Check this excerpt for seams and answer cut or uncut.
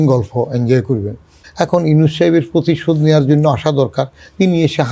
cut